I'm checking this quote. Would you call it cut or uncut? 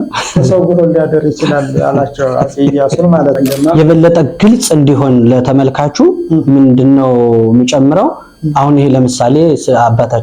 cut